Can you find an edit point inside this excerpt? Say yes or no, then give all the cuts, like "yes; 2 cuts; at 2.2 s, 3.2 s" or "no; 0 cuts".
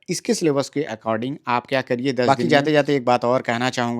yes; 1 cut; at 2.3 s